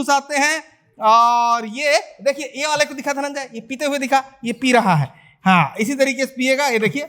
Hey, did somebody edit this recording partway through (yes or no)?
no